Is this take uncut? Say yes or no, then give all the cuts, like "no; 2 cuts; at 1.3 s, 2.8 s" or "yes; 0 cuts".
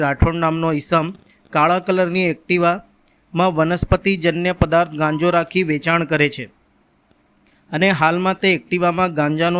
yes; 0 cuts